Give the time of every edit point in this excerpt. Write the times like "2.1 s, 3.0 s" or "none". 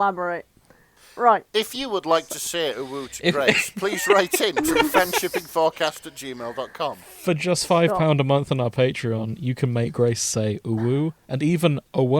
none